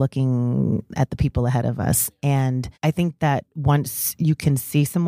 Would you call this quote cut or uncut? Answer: cut